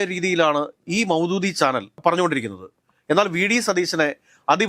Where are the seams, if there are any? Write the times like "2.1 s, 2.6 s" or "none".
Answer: 2.0 s